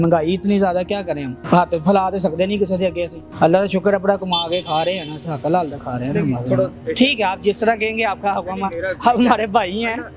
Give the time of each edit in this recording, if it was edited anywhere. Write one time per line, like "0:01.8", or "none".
none